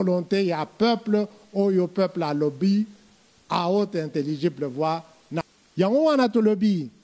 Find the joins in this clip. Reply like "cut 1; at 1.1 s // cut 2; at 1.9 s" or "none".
cut 1; at 5.4 s